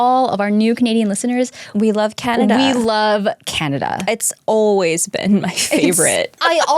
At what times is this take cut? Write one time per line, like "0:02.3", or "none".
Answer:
0:01.7